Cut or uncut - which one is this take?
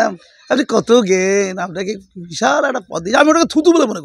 uncut